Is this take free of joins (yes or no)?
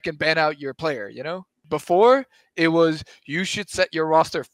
no